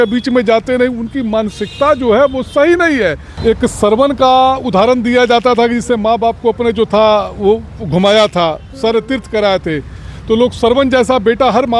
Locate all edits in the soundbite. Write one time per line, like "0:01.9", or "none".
0:03.3